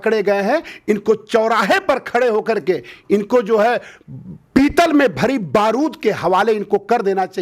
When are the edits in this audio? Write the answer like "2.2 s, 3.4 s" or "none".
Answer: none